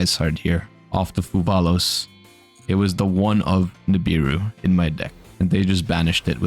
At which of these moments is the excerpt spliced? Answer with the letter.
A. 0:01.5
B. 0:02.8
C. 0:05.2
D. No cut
C